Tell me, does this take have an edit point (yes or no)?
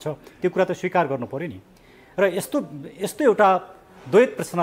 no